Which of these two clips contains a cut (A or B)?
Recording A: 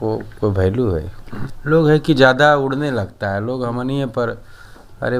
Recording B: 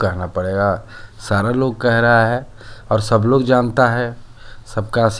A